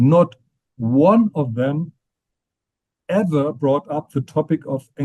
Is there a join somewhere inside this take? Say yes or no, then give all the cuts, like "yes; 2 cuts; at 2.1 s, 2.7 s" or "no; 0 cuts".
no; 0 cuts